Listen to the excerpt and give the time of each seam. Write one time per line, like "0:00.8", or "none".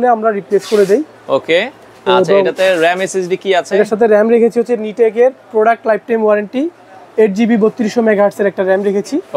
none